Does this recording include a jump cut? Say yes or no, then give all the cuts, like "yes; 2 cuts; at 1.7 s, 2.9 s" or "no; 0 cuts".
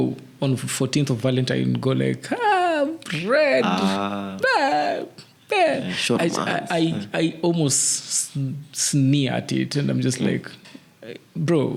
no; 0 cuts